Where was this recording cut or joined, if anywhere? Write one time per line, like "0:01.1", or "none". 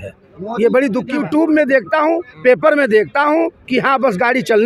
0:01.2